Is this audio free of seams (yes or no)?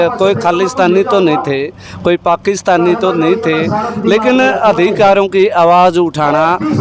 yes